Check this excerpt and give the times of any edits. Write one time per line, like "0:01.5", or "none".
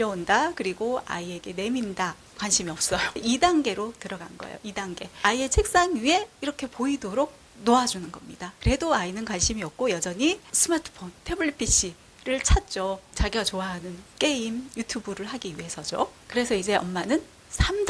0:02.3
0:08.5

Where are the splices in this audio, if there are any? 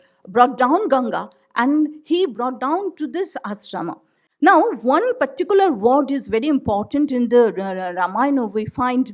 none

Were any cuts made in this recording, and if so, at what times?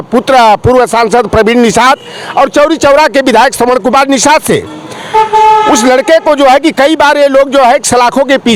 none

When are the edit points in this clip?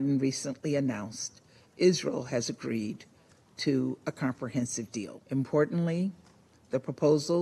0:05.2

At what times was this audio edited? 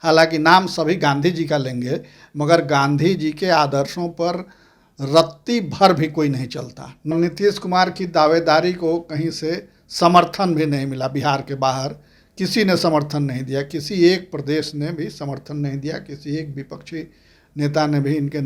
0:07.1

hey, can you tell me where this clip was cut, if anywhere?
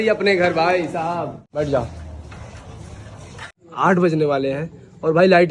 0:03.6

